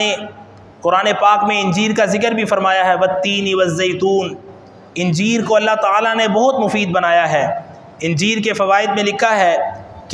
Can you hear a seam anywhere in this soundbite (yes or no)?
no